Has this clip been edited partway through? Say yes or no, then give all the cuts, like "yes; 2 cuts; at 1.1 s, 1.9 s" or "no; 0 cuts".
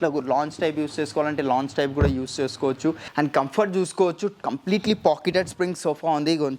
yes; 1 cut; at 3.0 s